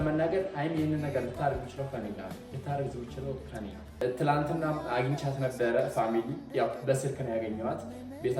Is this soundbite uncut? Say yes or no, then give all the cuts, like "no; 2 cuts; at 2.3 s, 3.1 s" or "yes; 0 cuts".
no; 1 cut; at 3.8 s